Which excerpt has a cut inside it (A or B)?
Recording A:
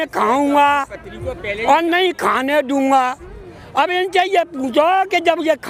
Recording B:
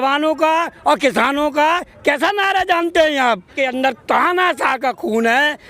B